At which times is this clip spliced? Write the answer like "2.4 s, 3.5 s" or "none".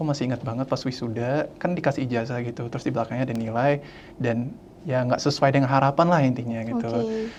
none